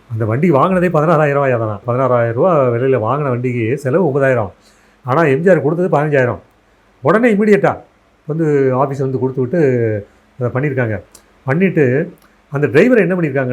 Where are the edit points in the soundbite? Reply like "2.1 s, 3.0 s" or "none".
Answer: 1.8 s